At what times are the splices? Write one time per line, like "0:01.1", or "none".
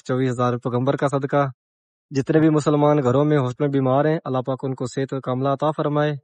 none